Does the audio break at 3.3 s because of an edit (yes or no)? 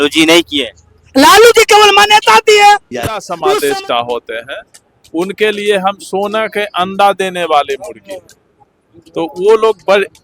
yes